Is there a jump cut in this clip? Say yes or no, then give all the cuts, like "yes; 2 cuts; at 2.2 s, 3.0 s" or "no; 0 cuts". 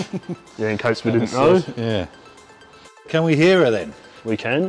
yes; 1 cut; at 3.1 s